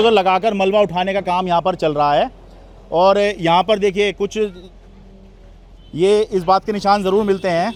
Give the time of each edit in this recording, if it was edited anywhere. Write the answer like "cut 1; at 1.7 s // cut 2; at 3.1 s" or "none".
none